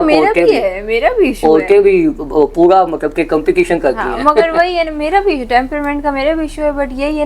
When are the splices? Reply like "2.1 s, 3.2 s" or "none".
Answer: none